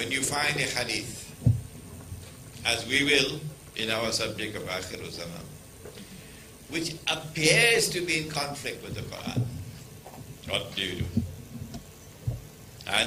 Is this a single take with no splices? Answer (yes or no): yes